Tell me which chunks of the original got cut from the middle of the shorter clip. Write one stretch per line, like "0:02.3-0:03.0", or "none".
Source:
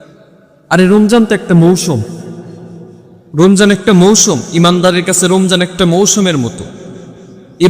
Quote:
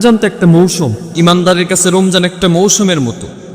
0:02.2-0:04.5